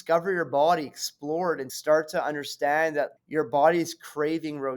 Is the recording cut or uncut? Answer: cut